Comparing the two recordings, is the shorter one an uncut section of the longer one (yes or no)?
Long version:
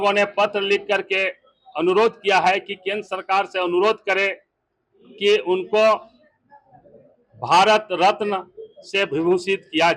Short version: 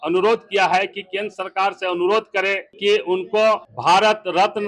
no